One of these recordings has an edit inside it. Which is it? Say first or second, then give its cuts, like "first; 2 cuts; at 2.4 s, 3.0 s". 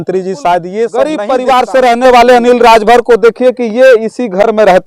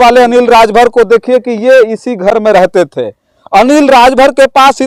first; 1 cut; at 0.9 s